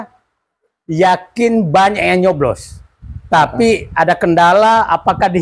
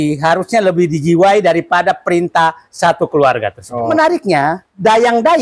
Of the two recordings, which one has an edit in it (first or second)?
second